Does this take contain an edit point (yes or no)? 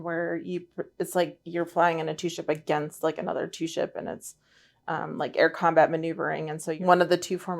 yes